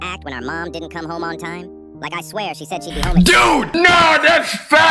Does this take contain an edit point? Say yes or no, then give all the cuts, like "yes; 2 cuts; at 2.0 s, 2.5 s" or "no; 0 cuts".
no; 0 cuts